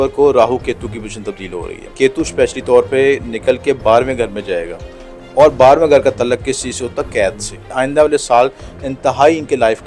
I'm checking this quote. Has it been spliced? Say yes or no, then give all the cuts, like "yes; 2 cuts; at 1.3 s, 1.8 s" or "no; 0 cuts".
yes; 2 cuts; at 1.9 s, 7.7 s